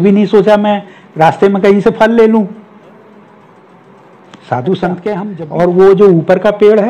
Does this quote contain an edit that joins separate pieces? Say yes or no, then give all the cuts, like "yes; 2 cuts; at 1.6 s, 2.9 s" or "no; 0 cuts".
yes; 1 cut; at 5.3 s